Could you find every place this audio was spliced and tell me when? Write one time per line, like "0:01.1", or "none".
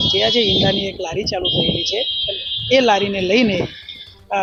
none